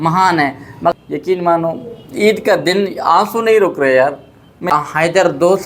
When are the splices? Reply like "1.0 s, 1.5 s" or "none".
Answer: 0.9 s, 4.7 s